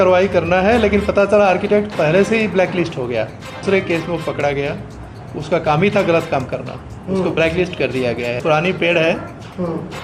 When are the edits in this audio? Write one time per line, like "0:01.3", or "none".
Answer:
0:03.6
0:08.4

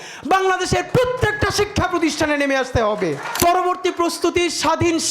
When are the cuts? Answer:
0:03.3

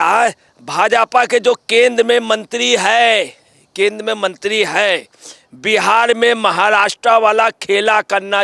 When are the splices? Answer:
none

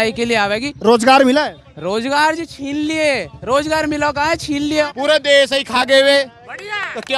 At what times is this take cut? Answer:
0:04.9

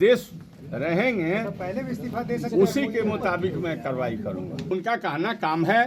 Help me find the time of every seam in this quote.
0:04.7

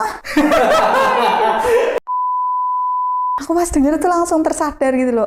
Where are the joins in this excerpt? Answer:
none

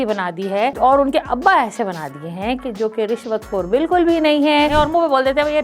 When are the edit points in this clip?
0:04.7

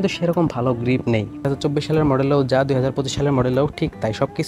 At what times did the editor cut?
0:01.5

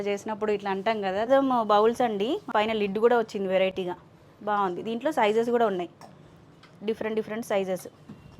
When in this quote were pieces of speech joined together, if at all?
0:01.3
0:02.5

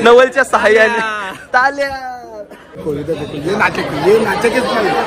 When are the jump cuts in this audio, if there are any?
0:02.8

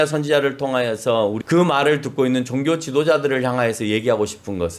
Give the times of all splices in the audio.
0:01.4

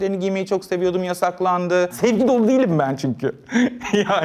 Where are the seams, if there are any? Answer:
0:01.9

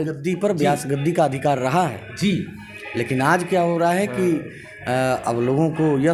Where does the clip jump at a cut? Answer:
none

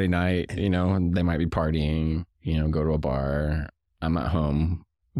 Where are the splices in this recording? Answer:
none

